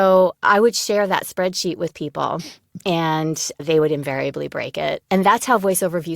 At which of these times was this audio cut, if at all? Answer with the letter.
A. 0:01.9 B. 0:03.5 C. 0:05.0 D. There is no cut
C